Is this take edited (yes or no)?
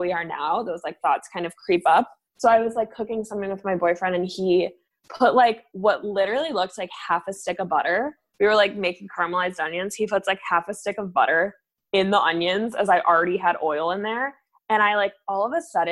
yes